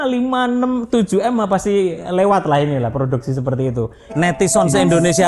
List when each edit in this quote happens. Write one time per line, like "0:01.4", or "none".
0:04.0